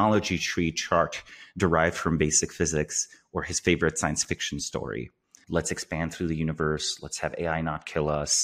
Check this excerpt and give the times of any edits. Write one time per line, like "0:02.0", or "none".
0:05.4